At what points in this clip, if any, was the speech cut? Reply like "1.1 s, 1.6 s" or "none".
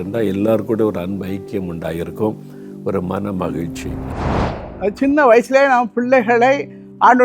4.2 s